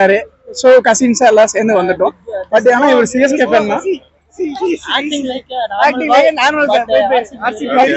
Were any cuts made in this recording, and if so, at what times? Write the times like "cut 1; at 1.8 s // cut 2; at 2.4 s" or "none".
none